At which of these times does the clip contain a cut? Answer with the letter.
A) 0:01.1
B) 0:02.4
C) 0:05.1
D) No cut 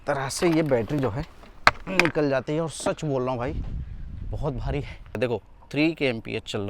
C